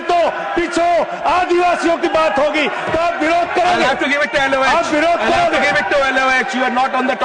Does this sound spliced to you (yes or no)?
no